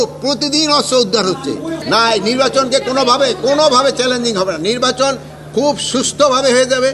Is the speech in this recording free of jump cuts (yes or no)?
no